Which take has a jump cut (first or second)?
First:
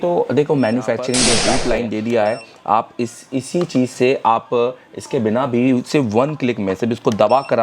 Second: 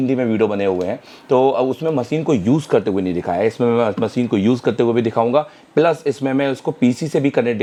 first